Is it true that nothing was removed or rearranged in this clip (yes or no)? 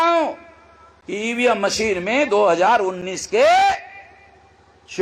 yes